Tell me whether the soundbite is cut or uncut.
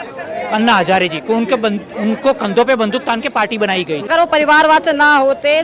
cut